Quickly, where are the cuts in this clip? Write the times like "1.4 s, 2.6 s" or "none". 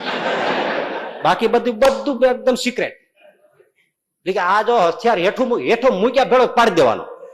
none